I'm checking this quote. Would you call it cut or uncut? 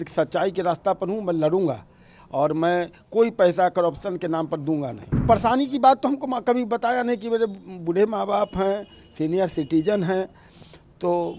cut